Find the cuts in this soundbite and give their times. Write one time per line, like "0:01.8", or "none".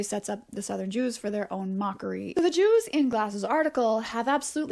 0:02.2